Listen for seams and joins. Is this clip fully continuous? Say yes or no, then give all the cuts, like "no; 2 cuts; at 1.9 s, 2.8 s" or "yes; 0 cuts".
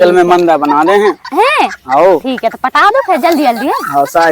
yes; 0 cuts